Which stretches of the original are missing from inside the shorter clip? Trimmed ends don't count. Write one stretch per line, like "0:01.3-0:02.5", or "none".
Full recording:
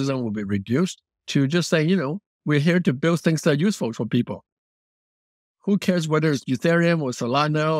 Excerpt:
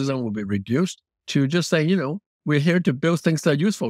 none